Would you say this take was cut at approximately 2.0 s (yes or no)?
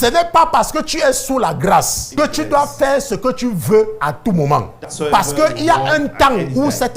yes